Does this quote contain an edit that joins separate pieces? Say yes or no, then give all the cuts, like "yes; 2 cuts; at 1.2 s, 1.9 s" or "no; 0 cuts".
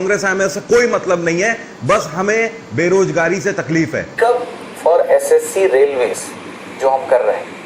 yes; 1 cut; at 4.0 s